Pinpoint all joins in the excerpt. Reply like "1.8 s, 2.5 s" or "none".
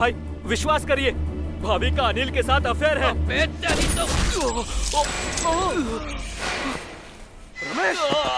none